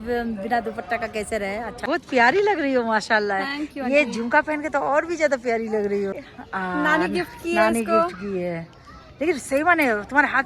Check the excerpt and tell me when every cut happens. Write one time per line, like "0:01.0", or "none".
0:01.8
0:06.1

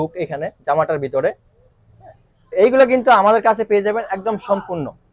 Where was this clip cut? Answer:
none

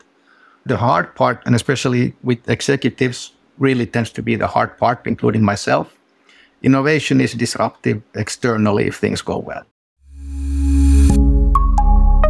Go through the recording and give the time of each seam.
0:09.7

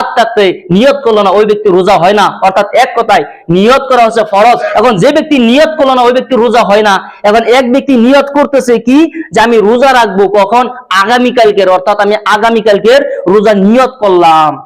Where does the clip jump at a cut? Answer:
0:04.6

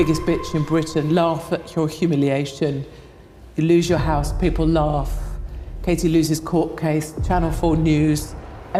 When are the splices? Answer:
none

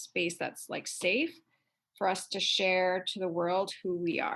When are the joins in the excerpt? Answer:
none

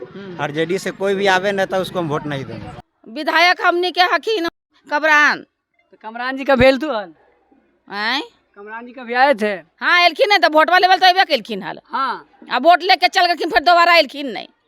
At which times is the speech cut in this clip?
none

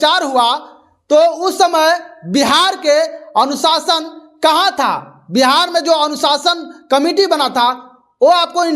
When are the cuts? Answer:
none

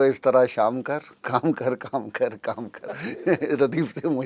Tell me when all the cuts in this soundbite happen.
none

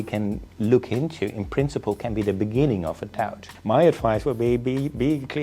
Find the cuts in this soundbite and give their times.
0:03.5

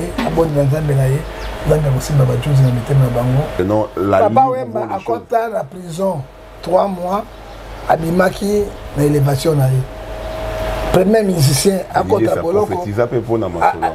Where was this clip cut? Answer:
0:03.6

